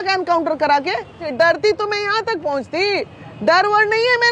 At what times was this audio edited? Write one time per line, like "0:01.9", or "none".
0:01.3